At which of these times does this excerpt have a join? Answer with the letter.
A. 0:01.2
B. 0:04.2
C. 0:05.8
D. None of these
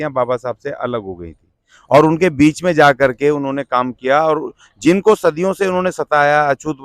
D